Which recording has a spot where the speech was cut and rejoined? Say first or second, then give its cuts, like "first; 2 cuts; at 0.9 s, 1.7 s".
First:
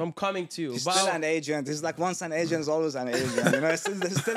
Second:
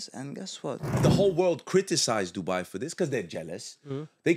second; 1 cut; at 1.0 s